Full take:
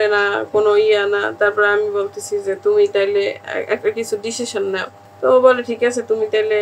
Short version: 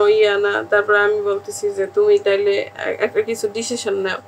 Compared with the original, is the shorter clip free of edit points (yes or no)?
yes